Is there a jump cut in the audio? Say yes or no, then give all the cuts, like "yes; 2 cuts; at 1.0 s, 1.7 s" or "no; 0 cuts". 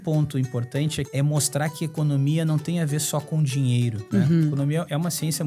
yes; 2 cuts; at 1.1 s, 4.0 s